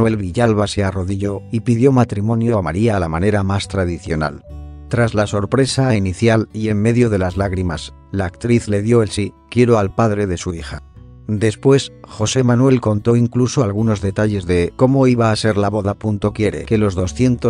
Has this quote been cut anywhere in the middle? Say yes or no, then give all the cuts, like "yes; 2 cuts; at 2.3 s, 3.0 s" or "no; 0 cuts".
yes; 1 cut; at 3.5 s